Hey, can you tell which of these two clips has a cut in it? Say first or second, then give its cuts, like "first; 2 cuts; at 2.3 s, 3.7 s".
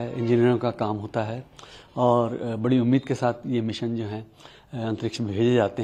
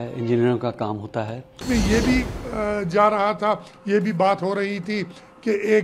second; 1 cut; at 1.6 s